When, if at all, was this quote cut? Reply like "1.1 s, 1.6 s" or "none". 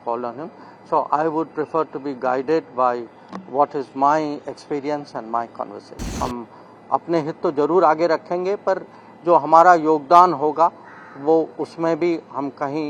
6.1 s